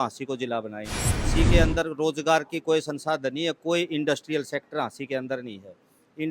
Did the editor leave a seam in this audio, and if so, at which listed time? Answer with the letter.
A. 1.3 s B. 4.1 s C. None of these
A